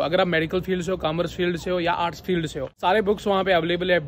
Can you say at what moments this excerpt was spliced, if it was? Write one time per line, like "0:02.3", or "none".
0:02.7